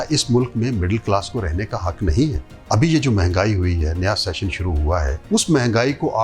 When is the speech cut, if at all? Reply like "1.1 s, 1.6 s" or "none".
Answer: 2.5 s, 5.2 s

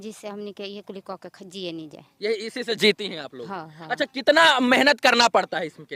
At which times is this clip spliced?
none

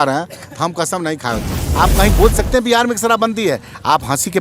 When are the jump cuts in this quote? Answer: 1.6 s

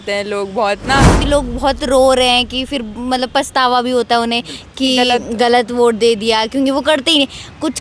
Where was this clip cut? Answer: 1.2 s

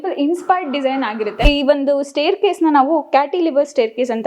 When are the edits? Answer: 1.5 s

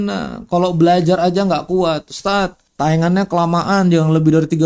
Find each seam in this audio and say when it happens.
2.6 s

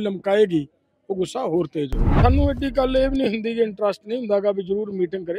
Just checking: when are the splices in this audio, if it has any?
2.0 s

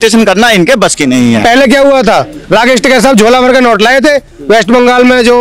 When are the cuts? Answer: 1.4 s

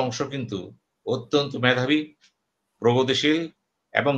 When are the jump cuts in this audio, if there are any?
none

